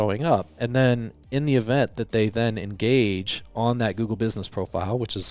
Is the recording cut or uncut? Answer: uncut